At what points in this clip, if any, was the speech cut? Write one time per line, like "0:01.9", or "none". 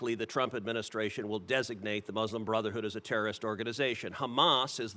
none